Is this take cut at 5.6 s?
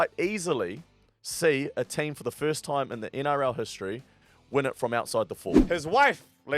yes; 1 cut; at 5.6 s

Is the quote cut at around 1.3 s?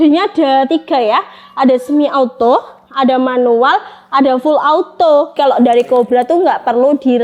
no; 1 cut; at 5.4 s

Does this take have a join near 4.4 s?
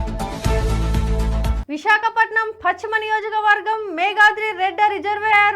no; 1 cut; at 1.6 s

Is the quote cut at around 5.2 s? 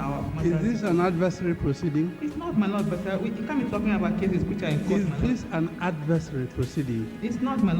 yes; 1 cut; at 5.2 s

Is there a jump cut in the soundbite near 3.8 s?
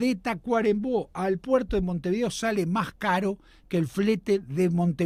no; 0 cuts

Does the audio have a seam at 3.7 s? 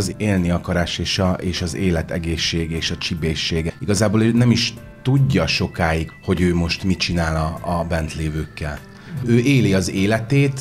yes; 2 cuts; at 3.7 s, 6.1 s

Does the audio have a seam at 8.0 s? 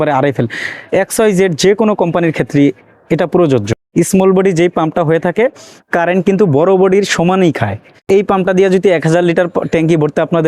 yes; 1 cut; at 8.0 s

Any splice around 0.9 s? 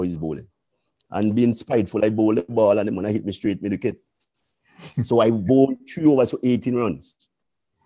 no; 0 cuts

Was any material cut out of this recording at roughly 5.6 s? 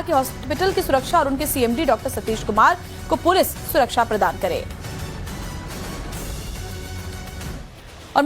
no; 1 cut; at 2.2 s

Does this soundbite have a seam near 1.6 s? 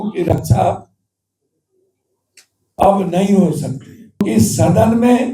no; 1 cut; at 4.2 s

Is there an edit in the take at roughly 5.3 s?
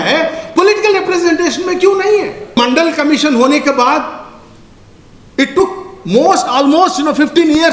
no; 1 cut; at 2.6 s

